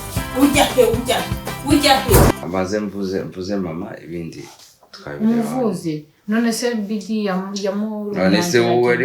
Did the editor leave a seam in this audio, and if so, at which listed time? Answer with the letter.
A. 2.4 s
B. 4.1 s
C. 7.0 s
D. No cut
A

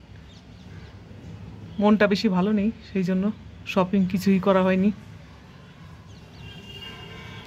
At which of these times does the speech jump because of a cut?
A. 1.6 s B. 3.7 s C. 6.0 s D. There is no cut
D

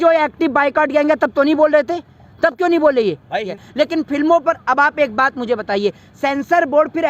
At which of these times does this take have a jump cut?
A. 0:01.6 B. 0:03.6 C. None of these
B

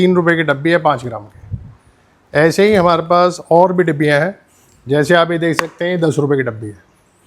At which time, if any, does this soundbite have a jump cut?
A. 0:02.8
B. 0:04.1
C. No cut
C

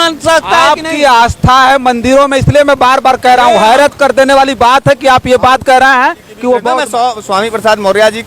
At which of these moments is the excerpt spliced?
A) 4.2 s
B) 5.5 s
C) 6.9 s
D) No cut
C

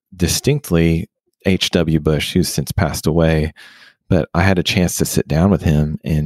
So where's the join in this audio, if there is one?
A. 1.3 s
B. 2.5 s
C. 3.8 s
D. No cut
D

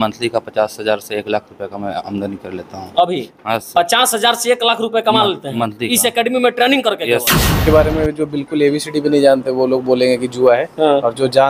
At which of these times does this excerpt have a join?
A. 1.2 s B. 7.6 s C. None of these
B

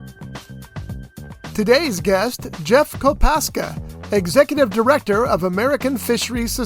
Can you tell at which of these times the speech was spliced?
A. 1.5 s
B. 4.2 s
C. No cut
A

